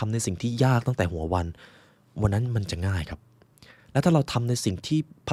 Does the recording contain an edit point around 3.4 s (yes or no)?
no